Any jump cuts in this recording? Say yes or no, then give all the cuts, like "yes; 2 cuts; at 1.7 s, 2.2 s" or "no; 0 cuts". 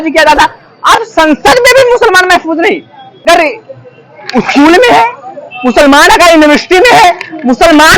yes; 1 cut; at 3.2 s